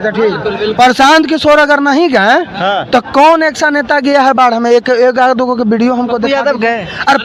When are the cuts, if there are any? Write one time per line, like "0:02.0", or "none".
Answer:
none